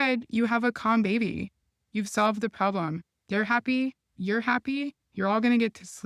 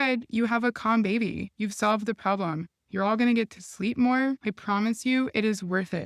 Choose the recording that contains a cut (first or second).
second